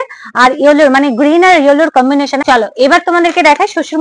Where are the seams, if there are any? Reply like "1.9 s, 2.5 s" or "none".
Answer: 2.4 s